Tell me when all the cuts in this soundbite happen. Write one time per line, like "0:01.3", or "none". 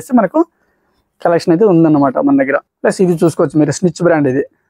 0:02.6